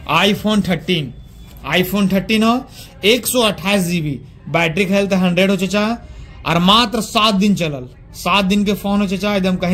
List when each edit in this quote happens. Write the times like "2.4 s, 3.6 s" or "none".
none